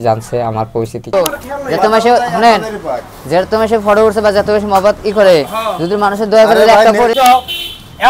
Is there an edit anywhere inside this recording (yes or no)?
yes